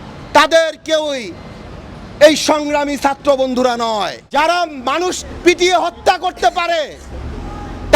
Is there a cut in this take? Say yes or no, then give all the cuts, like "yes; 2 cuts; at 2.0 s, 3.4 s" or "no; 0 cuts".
yes; 1 cut; at 4.2 s